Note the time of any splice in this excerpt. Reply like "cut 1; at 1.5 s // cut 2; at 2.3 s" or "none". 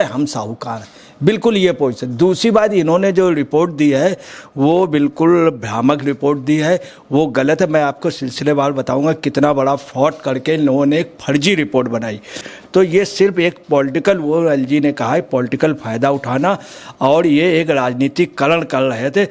cut 1; at 12.5 s